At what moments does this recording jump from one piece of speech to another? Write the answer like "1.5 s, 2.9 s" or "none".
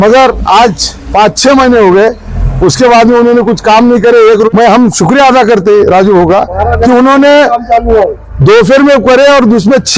4.5 s